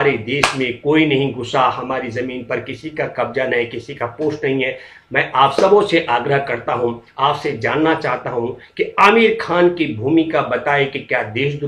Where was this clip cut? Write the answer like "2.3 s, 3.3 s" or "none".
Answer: none